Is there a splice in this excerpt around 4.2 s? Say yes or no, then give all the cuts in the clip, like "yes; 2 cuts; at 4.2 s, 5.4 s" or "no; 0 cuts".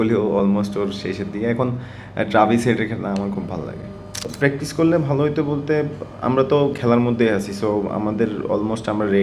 yes; 1 cut; at 4.2 s